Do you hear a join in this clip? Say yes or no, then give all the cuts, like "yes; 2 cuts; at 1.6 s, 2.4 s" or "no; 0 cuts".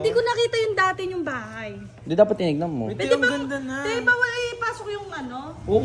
no; 0 cuts